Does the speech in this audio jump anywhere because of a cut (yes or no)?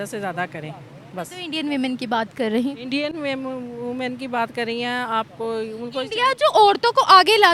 no